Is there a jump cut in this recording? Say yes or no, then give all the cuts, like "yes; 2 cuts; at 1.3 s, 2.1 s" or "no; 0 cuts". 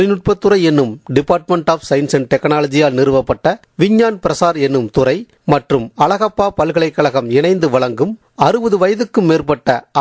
no; 0 cuts